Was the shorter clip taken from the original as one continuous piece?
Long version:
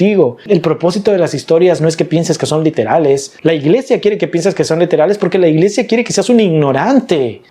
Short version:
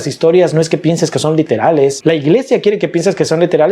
no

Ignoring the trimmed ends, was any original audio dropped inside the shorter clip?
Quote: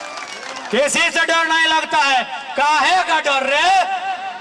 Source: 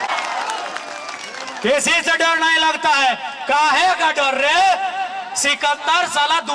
no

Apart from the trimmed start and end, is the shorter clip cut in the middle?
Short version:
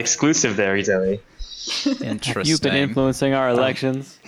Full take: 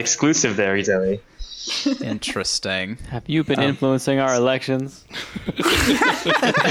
yes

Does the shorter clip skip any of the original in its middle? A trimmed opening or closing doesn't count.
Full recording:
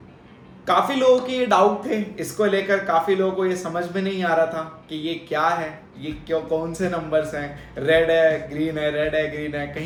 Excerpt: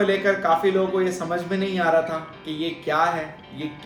no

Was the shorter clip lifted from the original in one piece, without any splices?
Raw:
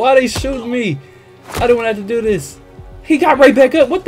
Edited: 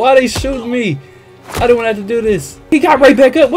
no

